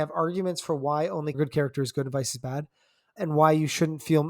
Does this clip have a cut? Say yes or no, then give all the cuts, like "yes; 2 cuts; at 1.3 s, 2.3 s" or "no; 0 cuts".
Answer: yes; 2 cuts; at 1.3 s, 3.1 s